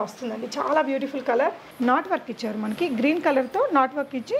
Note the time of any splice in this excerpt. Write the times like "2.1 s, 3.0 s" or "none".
1.7 s